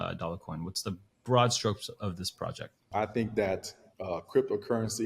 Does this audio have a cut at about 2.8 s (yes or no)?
yes